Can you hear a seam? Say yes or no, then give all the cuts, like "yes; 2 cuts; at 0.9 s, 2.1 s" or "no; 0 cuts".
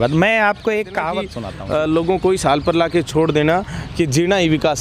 yes; 1 cut; at 1.4 s